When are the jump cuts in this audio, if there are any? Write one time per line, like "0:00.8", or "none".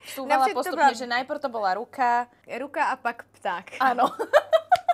0:02.4